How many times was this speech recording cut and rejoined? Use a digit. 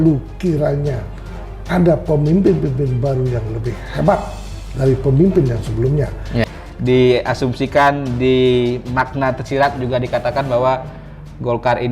1